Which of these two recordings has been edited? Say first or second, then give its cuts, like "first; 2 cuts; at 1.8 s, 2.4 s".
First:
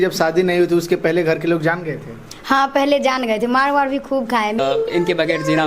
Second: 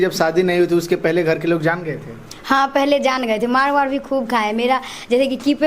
first; 1 cut; at 4.6 s